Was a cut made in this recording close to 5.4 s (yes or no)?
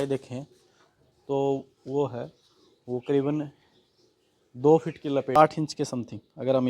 yes